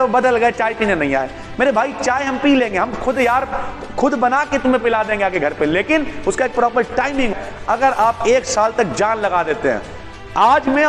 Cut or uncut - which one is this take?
cut